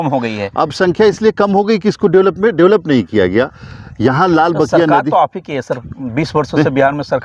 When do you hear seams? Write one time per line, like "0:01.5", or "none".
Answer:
none